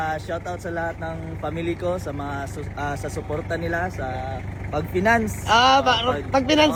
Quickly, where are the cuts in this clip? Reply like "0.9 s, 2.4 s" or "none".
none